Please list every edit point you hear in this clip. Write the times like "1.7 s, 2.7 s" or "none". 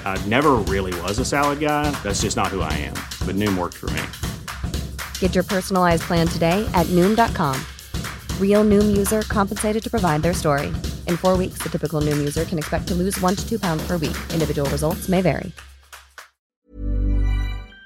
16.6 s